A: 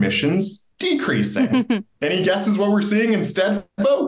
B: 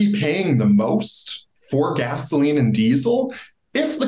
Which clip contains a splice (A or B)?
A